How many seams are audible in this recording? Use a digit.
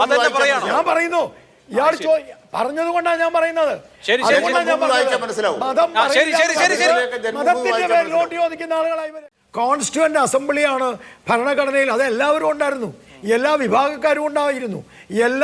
1